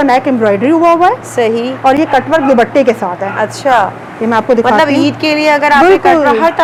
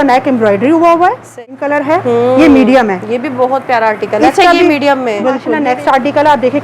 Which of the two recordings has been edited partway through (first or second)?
second